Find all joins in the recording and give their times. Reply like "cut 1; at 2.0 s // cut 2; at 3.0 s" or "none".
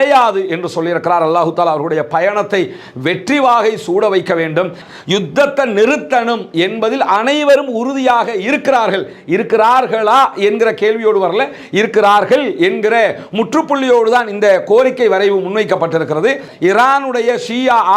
cut 1; at 4.8 s // cut 2; at 16.5 s

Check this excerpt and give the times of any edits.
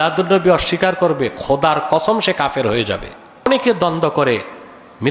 cut 1; at 3.5 s

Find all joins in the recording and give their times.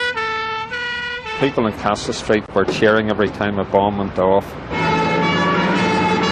none

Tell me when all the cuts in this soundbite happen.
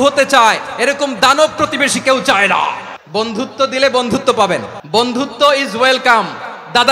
cut 1; at 2.9 s // cut 2; at 4.8 s

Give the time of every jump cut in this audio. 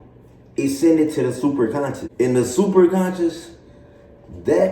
cut 1; at 2.0 s

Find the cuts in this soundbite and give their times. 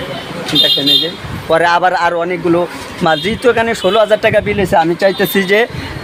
none

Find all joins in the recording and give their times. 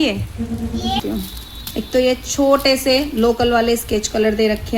cut 1; at 1.0 s

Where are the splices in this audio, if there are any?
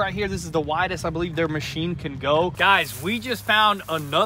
cut 1; at 2.6 s

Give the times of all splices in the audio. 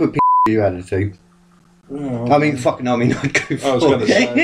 none

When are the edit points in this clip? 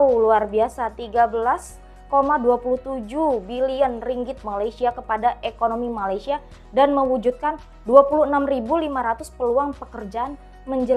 none

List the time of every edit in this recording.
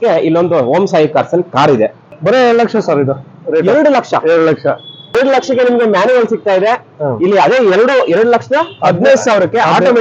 cut 1; at 2.0 s // cut 2; at 5.1 s

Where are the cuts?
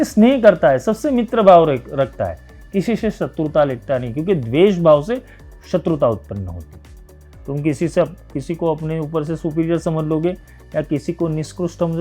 none

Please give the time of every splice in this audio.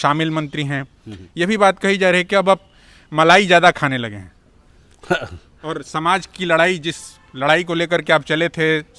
none

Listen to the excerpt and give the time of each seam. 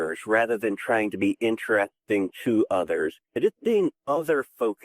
cut 1; at 3.2 s

